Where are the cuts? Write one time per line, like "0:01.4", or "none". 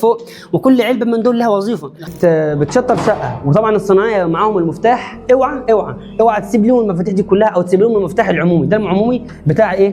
0:02.1